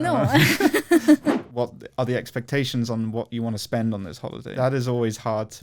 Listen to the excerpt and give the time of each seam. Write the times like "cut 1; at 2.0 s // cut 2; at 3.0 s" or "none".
cut 1; at 1.4 s // cut 2; at 4.4 s